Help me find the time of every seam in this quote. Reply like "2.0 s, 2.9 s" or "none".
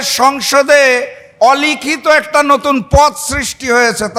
none